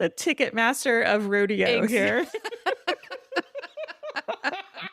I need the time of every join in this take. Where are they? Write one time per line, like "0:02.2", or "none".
none